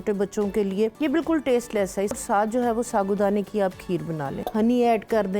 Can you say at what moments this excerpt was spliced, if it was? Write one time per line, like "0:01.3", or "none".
0:00.9
0:02.2
0:04.3